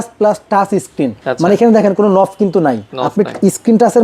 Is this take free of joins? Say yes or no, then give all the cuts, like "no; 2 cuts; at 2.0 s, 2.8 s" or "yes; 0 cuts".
no; 2 cuts; at 1.2 s, 2.9 s